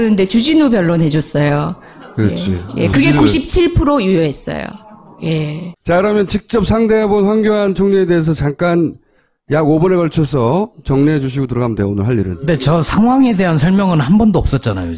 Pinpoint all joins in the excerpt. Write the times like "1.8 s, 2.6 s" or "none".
14.1 s